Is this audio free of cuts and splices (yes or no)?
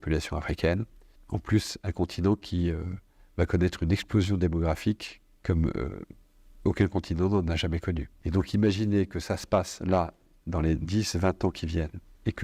no